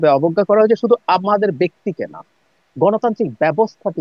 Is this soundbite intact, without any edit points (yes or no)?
yes